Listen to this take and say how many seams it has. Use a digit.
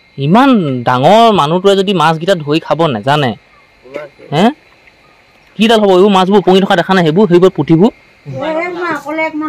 1